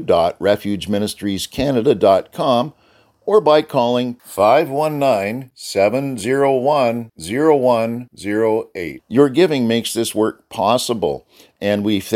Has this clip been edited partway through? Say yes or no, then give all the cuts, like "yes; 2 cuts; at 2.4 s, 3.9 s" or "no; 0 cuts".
no; 0 cuts